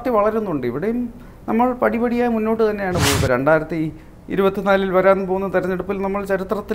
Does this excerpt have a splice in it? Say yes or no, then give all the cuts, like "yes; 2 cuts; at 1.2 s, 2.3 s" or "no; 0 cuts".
yes; 1 cut; at 3.2 s